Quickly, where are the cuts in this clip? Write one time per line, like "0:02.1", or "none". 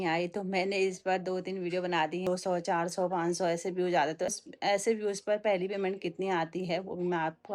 0:02.3
0:04.3

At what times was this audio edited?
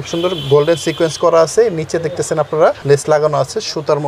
0:02.8

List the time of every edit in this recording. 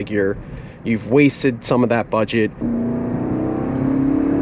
0:02.6

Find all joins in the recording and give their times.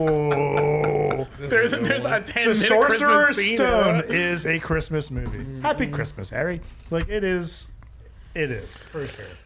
none

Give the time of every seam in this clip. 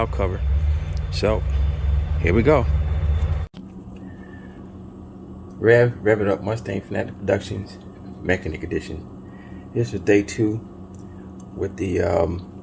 0:03.5

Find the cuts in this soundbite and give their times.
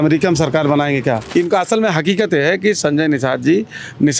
0:01.2

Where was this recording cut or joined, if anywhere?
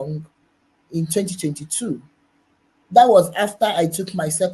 none

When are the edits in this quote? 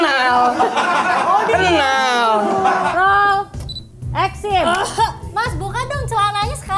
0:02.9

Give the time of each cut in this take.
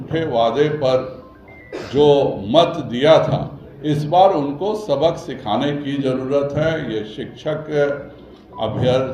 none

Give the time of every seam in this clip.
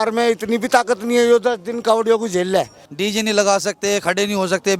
0:02.8

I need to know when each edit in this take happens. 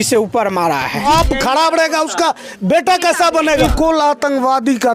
0:01.1
0:03.7

